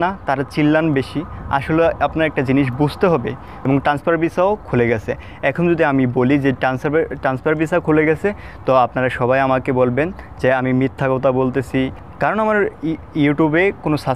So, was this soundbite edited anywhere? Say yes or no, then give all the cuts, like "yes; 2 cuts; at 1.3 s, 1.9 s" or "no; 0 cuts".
yes; 2 cuts; at 3.5 s, 12.0 s